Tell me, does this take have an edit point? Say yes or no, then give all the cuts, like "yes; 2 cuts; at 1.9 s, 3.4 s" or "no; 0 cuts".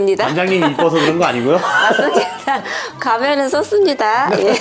no; 0 cuts